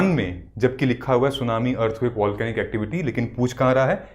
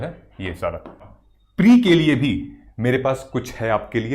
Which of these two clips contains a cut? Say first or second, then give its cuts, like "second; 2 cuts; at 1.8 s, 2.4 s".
second; 1 cut; at 1.1 s